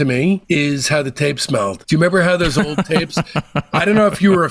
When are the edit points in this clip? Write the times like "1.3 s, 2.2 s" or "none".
none